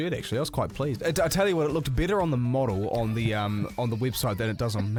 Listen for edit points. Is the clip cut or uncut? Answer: uncut